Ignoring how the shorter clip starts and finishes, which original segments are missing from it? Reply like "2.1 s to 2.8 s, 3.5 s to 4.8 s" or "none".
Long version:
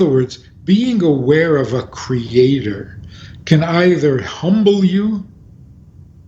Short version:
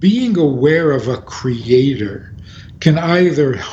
none